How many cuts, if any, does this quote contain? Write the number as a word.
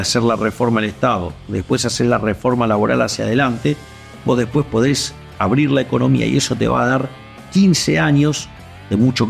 zero